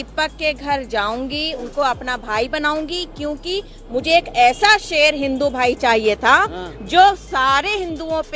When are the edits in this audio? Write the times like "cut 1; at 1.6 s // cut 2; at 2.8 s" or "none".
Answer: cut 1; at 1.6 s